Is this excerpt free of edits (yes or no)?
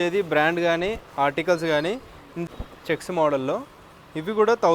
no